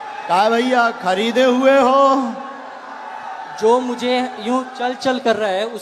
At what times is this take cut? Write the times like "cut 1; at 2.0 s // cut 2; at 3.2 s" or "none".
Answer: none

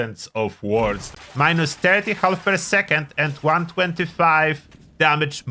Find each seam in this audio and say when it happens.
cut 1; at 1.1 s

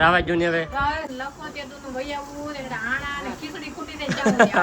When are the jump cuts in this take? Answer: cut 1; at 1.1 s

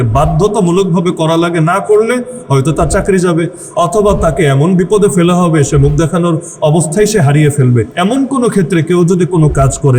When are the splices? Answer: cut 1; at 6.5 s // cut 2; at 7.9 s

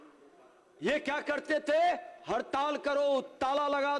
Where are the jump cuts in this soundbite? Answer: none

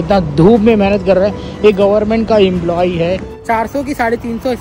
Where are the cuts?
cut 1; at 3.3 s

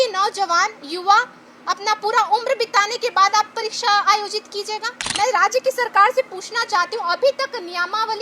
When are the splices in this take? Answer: cut 1; at 5.0 s

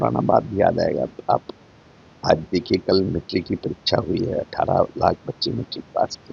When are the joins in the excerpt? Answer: none

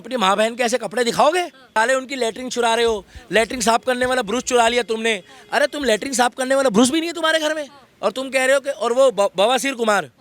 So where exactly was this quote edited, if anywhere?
none

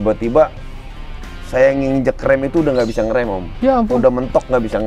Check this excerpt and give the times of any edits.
none

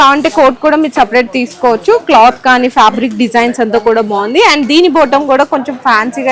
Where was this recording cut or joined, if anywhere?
none

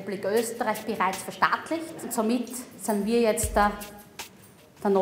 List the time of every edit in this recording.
cut 1; at 2.1 s

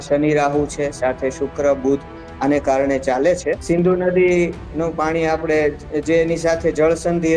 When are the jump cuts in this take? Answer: cut 1; at 3.6 s

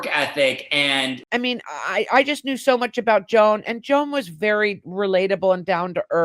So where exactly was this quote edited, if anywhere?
cut 1; at 1.2 s

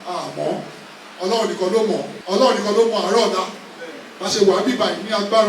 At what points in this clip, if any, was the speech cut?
cut 1; at 2.1 s

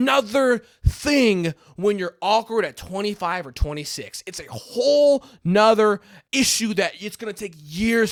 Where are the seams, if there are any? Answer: none

